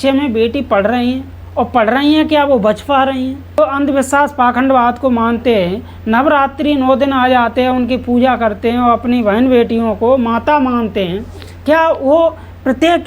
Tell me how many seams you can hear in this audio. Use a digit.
1